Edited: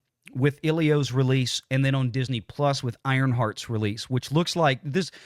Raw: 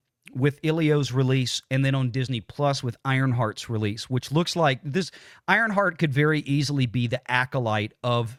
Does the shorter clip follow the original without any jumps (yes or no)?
yes